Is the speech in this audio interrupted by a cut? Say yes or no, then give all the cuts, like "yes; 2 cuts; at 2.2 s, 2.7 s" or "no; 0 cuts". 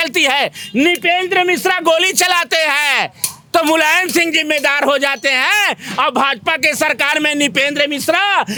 no; 0 cuts